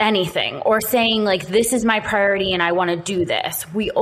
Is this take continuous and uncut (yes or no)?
yes